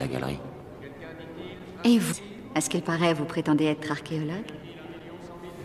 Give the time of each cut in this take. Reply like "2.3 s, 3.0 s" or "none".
3.1 s